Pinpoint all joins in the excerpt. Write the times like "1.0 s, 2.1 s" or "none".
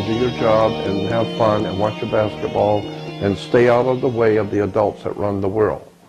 none